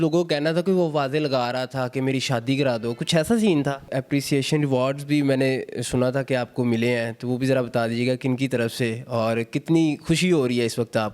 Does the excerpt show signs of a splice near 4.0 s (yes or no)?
yes